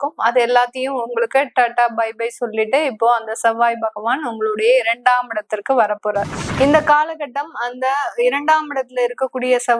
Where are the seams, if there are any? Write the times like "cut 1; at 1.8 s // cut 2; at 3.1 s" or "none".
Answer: cut 1; at 6.4 s

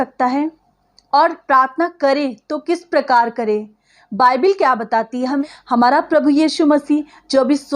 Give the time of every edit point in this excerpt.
cut 1; at 5.4 s

